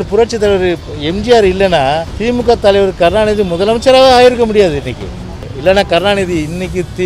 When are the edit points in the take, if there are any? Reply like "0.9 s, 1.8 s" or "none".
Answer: 2.1 s, 5.5 s